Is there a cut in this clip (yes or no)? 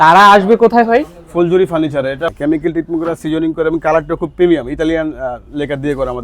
yes